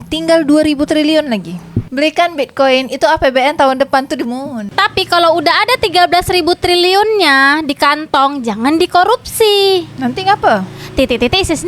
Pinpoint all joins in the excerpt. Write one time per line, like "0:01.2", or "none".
0:04.7